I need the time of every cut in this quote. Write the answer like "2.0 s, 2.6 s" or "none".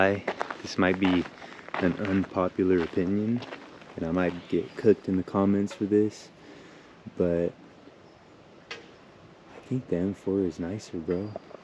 none